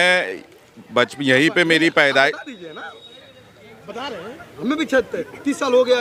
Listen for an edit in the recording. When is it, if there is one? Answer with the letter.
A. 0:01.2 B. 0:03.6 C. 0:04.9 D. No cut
D